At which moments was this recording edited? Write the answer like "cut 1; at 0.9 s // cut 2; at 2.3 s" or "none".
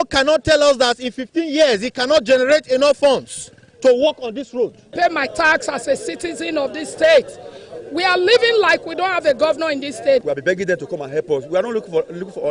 cut 1; at 4.9 s // cut 2; at 10.2 s